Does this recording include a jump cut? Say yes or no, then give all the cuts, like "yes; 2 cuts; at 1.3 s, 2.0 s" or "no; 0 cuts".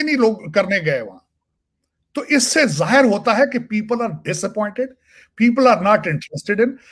no; 0 cuts